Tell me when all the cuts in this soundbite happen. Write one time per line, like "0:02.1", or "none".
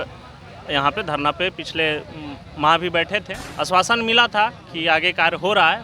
0:03.4